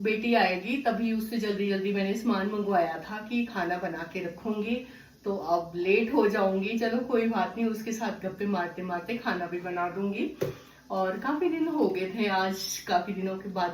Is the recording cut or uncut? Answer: uncut